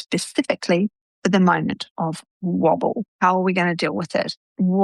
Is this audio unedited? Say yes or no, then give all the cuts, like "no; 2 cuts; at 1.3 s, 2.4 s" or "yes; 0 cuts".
no; 1 cut; at 3.1 s